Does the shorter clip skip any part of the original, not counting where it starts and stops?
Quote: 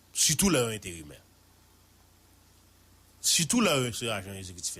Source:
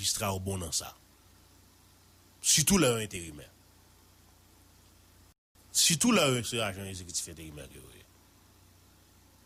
yes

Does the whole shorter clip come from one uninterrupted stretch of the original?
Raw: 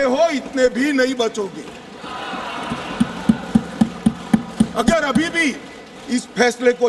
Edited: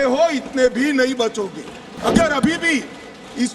no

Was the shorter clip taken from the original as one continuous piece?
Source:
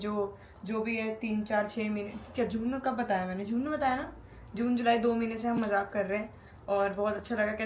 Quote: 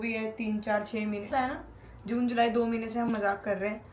no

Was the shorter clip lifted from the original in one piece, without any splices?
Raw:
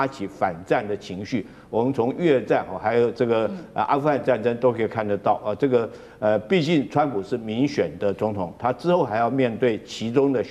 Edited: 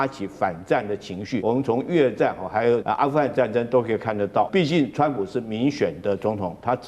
no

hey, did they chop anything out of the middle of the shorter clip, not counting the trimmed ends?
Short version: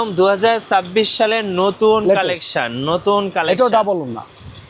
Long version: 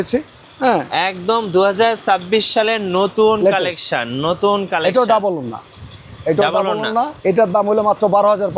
no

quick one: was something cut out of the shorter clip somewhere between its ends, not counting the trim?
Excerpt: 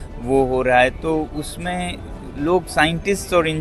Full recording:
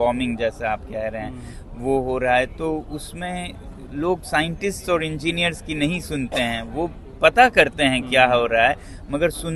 no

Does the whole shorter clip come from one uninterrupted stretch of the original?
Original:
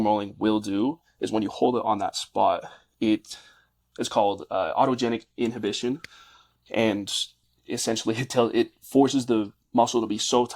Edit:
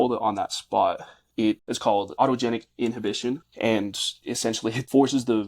no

